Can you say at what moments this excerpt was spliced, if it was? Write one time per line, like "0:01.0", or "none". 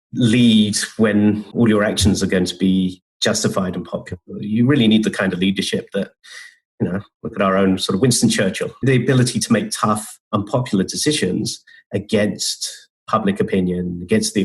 0:01.5
0:08.8